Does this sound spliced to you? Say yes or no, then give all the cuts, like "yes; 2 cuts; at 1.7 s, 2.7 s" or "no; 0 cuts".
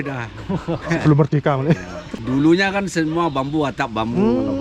yes; 1 cut; at 2.2 s